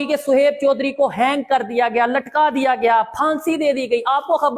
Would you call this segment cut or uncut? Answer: uncut